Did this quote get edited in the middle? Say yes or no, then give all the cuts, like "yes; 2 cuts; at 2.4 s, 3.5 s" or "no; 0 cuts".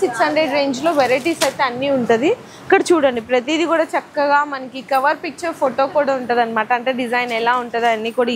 no; 0 cuts